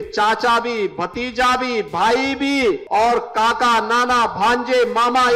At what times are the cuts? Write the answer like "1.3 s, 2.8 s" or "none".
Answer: 2.8 s